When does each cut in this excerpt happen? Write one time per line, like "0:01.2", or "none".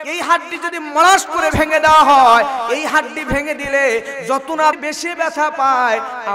0:04.8